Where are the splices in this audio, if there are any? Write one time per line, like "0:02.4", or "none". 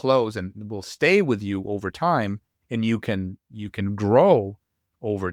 none